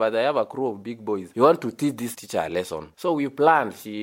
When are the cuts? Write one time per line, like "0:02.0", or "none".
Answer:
0:01.3
0:02.1